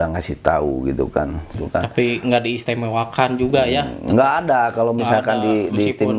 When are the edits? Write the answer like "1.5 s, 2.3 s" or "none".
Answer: 1.5 s